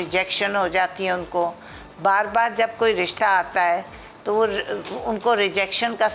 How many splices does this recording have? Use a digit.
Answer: 0